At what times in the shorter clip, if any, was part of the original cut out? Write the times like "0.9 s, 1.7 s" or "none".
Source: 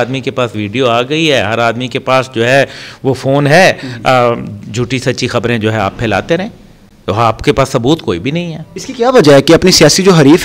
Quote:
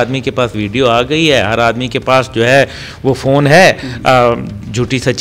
none